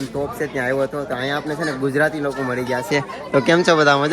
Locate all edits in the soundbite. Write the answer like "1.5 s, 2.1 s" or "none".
none